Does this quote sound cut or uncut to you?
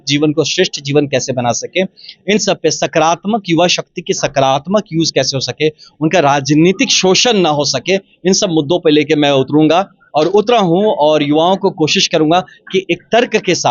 uncut